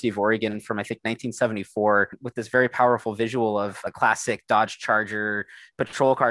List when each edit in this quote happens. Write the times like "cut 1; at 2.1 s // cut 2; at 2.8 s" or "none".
cut 1; at 2.1 s // cut 2; at 3.9 s